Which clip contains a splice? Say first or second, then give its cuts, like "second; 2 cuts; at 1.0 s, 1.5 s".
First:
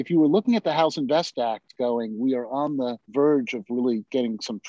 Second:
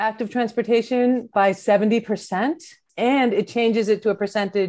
second; 1 cut; at 2.9 s